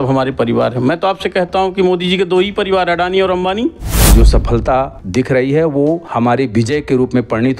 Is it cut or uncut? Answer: cut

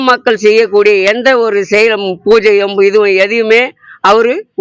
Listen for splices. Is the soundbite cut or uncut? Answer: uncut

